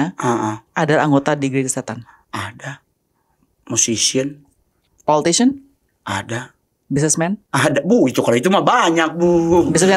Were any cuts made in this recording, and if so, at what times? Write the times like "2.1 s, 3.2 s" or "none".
none